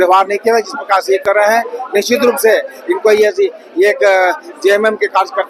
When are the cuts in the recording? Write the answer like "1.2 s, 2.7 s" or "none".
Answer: none